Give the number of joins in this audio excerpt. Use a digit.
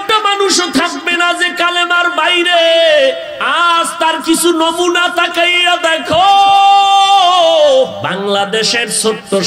2